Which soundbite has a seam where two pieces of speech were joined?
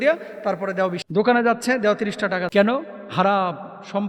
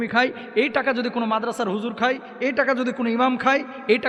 first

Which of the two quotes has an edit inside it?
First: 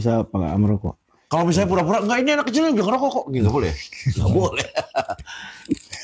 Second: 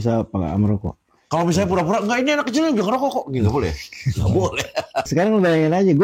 second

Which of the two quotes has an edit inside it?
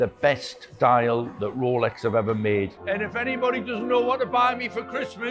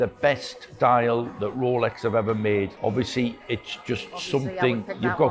first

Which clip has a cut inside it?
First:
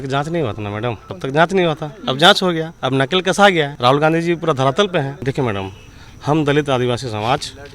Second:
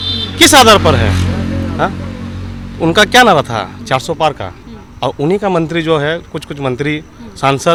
first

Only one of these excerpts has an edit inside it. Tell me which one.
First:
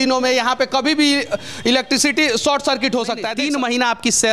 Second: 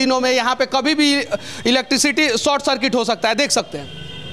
first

